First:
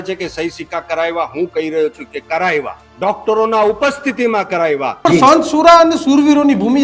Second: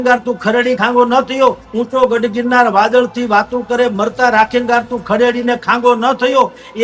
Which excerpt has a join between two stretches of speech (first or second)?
first